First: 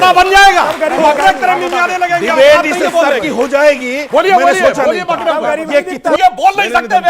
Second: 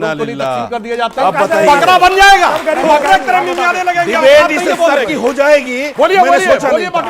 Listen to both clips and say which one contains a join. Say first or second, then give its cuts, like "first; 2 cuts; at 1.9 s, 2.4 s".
first; 1 cut; at 6.2 s